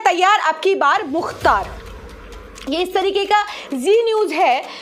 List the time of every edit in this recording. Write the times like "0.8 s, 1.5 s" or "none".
none